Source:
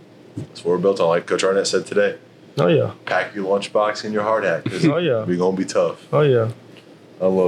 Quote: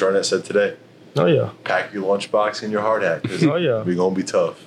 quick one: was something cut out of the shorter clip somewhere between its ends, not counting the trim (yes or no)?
no